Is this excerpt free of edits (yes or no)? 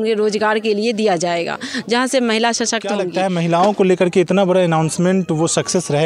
no